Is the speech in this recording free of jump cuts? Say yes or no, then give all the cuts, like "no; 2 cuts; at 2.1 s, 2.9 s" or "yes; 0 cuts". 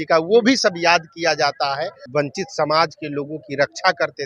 no; 1 cut; at 2.0 s